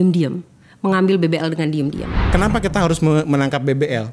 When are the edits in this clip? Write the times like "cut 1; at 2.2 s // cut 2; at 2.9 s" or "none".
cut 1; at 2.3 s